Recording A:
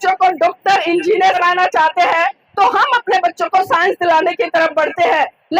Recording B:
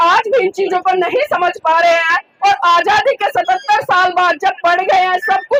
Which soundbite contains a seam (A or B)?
A